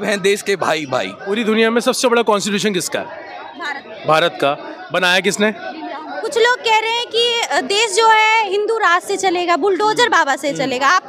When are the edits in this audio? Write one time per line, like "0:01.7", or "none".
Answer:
0:01.3
0:06.2